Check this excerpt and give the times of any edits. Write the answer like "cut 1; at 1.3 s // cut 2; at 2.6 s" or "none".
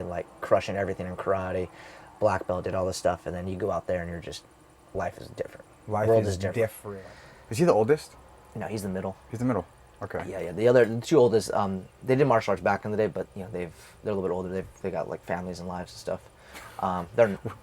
cut 1; at 6.8 s

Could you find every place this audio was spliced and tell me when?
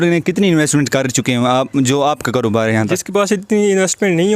cut 1; at 3.0 s

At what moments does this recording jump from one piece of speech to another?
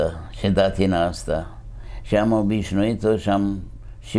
none

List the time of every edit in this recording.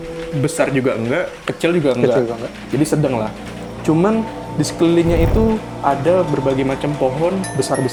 none

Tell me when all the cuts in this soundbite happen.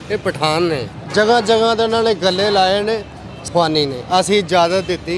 cut 1; at 1.0 s // cut 2; at 3.4 s

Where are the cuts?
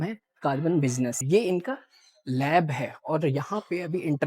cut 1; at 1.2 s

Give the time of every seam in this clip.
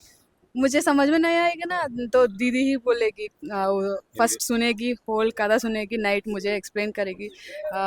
none

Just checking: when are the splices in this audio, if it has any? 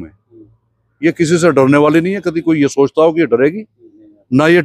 none

